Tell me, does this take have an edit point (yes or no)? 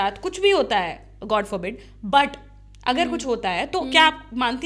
no